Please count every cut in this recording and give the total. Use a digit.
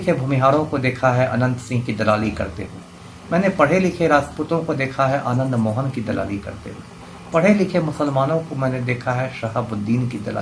0